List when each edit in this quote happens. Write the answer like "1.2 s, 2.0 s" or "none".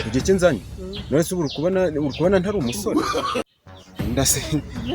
3.5 s